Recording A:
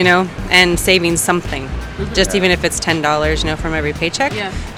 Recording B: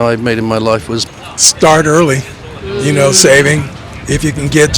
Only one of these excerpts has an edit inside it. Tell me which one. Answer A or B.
B